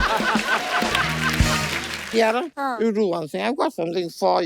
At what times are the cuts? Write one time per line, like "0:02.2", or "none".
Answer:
0:01.9
0:02.5